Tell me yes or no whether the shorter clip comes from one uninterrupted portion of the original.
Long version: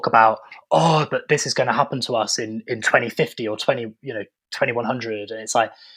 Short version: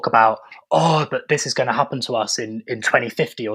yes